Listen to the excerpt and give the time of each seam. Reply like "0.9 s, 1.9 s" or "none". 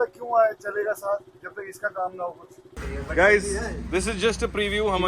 2.8 s